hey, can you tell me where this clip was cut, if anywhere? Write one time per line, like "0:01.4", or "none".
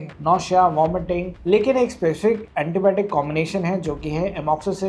0:01.3